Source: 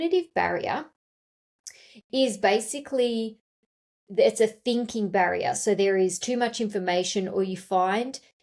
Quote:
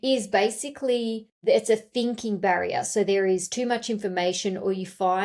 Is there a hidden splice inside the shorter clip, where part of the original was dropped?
yes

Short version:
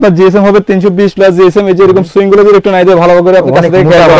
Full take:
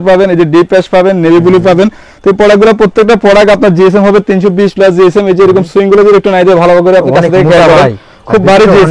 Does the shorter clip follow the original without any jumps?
yes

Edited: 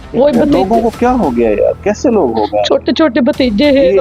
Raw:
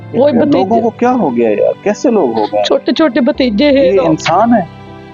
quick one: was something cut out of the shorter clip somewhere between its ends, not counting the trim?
no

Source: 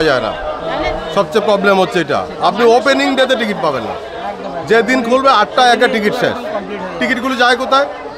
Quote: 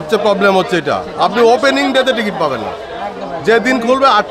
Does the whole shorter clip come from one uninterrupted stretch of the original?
yes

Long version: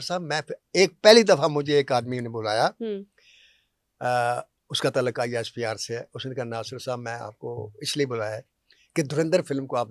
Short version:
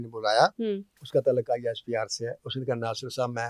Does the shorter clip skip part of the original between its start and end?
yes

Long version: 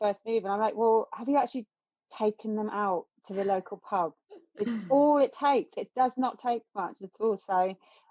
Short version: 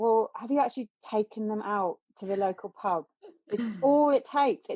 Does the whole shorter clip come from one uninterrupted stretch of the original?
no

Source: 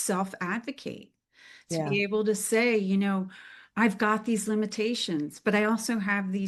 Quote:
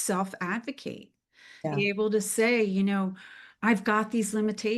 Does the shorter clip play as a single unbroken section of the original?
no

